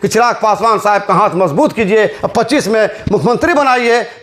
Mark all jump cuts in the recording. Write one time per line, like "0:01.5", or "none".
none